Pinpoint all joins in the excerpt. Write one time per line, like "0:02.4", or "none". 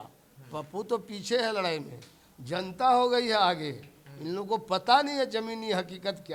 none